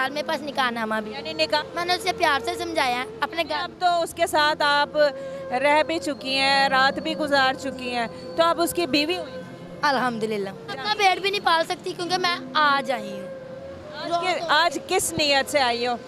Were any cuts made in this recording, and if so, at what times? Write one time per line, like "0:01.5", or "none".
0:01.6
0:10.8